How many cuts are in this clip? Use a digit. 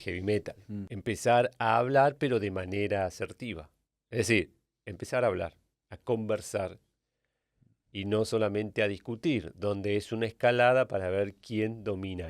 1